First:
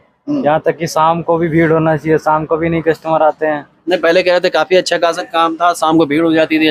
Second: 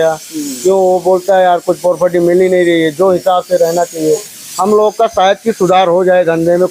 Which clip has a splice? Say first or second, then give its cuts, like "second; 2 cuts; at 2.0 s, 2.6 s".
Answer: second; 1 cut; at 4.4 s